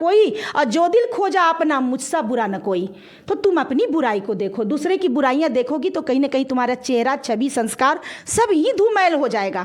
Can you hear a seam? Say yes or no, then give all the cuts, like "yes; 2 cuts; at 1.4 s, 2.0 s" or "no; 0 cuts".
no; 0 cuts